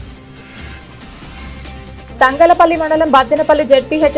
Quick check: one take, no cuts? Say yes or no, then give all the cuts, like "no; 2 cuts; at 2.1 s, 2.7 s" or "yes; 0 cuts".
no; 2 cuts; at 0.9 s, 2.1 s